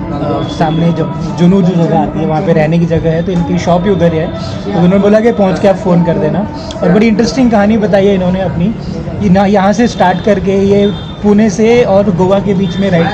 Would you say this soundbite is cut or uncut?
uncut